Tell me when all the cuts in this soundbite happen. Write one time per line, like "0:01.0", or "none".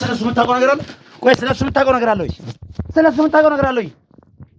none